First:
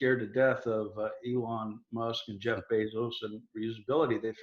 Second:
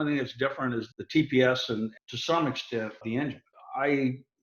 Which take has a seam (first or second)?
second